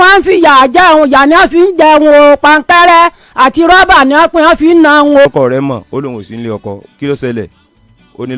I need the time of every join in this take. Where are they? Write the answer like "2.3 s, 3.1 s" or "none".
5.3 s